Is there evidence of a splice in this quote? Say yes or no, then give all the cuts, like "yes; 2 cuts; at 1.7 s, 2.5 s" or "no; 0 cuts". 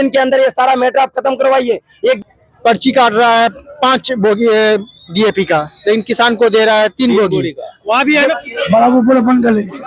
yes; 2 cuts; at 2.2 s, 8.4 s